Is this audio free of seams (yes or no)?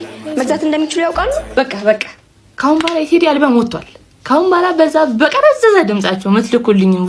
no